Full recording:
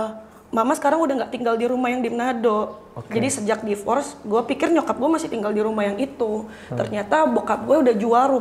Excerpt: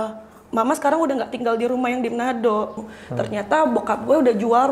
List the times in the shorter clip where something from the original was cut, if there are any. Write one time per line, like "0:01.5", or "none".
0:02.9